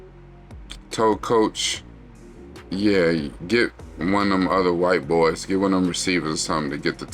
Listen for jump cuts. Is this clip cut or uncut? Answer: cut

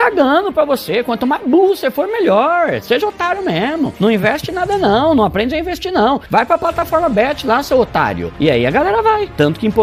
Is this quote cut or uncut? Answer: cut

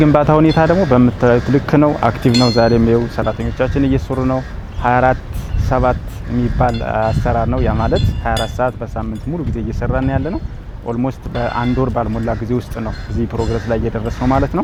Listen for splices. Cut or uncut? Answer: uncut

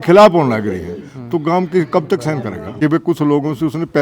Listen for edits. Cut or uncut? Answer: cut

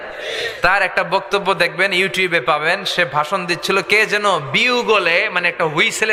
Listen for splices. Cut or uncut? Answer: uncut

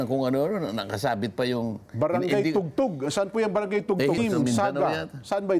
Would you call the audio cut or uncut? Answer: cut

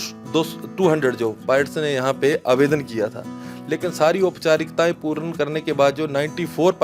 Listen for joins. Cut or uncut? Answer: uncut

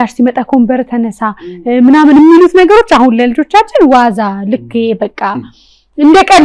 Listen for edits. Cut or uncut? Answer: uncut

